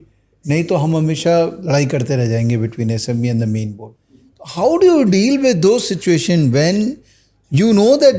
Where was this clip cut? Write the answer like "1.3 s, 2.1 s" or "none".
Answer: 3.8 s